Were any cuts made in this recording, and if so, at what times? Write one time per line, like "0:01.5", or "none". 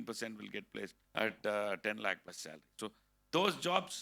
0:01.0